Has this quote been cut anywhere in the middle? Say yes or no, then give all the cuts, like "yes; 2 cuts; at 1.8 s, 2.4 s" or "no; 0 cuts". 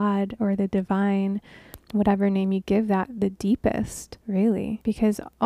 no; 0 cuts